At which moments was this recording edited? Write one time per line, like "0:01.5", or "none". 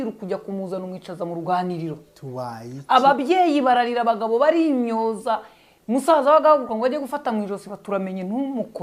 none